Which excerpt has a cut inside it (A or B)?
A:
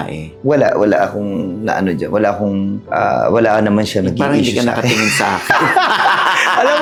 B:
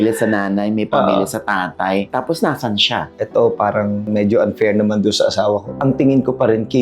B